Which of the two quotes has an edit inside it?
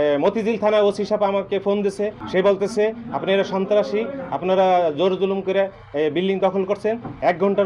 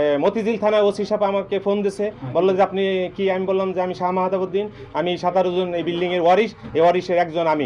first; 1 cut; at 2.2 s

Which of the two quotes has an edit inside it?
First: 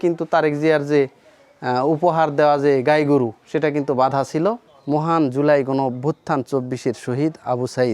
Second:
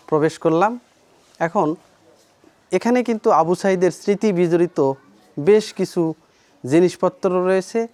first; 1 cut; at 4.7 s

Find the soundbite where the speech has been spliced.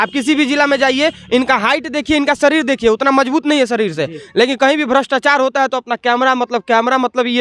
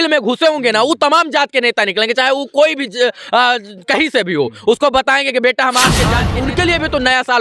second; 1 cut; at 6.3 s

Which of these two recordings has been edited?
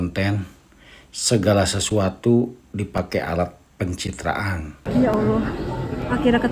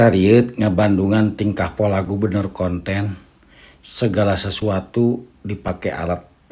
first; 1 cut; at 4.8 s

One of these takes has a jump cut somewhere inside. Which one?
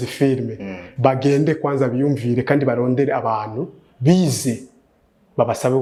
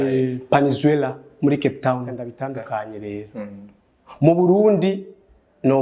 second; 1 cut; at 2.3 s

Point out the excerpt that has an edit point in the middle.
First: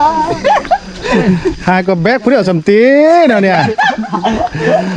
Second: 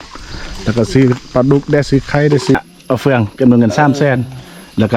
second; 1 cut; at 2.5 s

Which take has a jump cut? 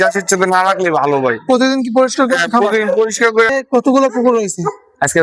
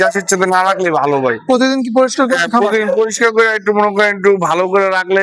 first; 1 cut; at 3.5 s

